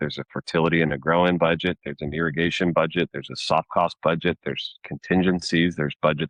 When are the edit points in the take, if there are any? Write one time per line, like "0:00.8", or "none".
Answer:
none